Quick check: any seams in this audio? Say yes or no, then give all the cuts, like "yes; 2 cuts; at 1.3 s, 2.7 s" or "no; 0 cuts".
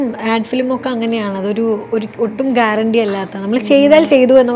no; 0 cuts